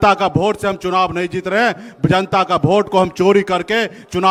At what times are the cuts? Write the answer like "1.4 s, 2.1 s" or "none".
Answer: none